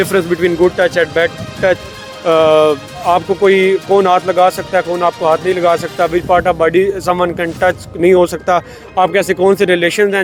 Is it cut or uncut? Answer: uncut